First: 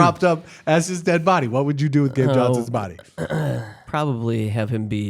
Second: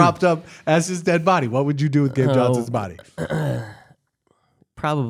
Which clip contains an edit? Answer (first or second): first